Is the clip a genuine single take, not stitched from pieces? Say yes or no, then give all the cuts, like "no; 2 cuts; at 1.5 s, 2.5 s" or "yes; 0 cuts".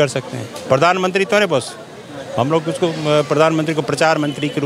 yes; 0 cuts